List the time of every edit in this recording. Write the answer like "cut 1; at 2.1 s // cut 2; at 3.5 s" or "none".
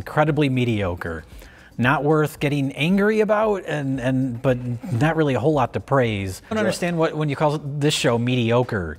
cut 1; at 6.5 s